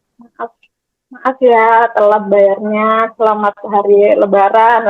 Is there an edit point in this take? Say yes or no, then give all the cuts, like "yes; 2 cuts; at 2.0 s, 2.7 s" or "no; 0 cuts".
no; 0 cuts